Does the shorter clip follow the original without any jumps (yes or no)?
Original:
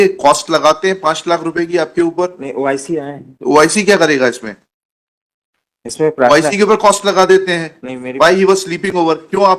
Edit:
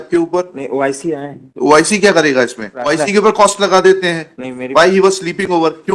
no